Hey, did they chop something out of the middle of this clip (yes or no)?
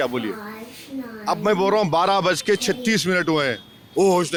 no